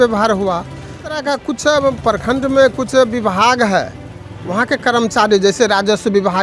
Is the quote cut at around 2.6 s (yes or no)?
no